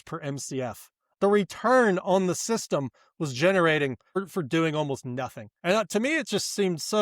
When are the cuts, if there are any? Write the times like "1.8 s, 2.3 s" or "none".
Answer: 1.1 s, 4.2 s